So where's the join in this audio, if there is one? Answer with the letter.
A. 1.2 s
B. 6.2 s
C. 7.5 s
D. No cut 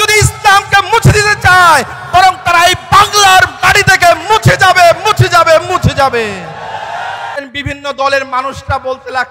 C